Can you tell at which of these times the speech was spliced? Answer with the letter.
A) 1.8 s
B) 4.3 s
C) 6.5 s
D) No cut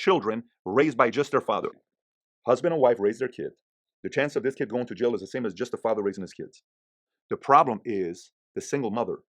A